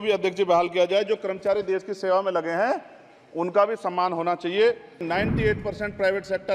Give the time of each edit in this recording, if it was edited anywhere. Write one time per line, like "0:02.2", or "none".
0:05.0